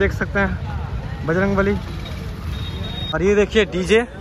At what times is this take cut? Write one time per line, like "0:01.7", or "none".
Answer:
0:03.1